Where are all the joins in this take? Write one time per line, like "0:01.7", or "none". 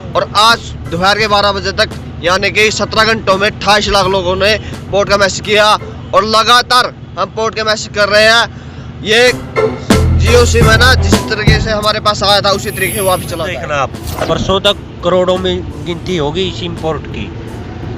0:13.6